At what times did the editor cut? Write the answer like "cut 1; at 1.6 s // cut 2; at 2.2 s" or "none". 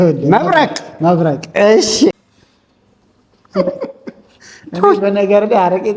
cut 1; at 2.1 s